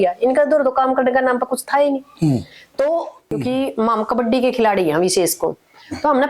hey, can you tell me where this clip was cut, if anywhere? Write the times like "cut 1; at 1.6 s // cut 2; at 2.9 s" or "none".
cut 1; at 3.2 s